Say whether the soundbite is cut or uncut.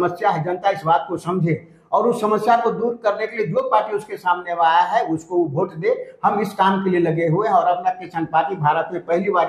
uncut